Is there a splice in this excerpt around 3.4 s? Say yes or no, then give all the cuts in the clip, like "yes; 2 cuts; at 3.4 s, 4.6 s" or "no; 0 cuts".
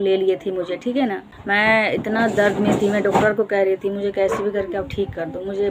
no; 1 cut; at 1.3 s